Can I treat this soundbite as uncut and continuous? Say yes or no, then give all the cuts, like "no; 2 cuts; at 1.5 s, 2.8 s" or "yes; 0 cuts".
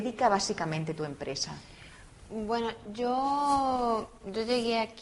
yes; 0 cuts